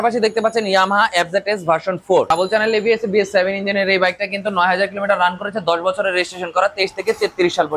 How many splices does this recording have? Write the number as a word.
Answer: one